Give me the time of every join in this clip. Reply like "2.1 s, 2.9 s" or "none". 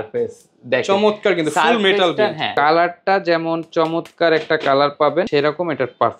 2.5 s, 5.3 s